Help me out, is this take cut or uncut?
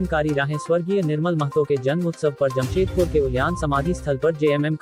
uncut